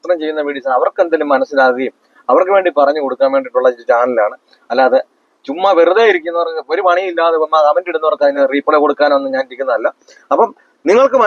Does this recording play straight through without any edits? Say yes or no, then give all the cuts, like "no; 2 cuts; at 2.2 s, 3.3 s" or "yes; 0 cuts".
no; 1 cut; at 8.3 s